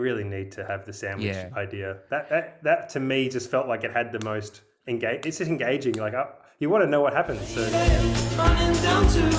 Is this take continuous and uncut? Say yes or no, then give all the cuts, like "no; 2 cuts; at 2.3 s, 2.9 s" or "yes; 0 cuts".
no; 1 cut; at 7.6 s